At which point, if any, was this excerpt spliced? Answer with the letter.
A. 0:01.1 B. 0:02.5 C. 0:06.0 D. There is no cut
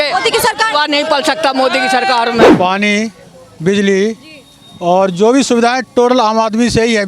B